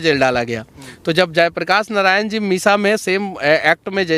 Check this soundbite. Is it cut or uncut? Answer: uncut